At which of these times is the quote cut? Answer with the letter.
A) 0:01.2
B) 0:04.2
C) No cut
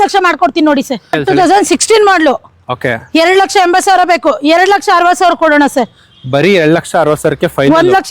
A